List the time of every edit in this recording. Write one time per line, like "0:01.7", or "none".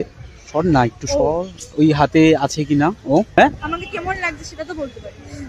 0:03.4